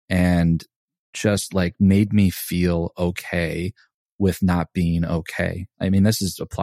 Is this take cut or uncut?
cut